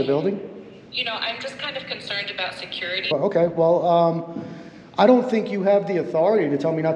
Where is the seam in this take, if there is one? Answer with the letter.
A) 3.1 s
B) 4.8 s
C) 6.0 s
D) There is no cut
A